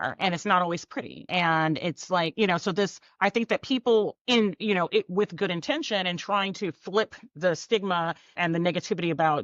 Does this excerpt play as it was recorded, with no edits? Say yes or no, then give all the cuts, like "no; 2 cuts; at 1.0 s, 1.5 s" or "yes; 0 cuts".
no; 4 cuts; at 1.3 s, 3.0 s, 4.2 s, 8.4 s